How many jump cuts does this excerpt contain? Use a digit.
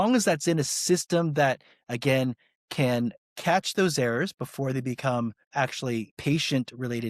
2